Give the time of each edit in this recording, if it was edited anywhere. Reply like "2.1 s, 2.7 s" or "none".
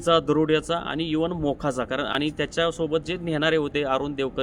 none